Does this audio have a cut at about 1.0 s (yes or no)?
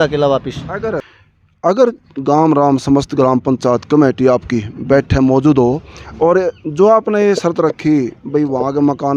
no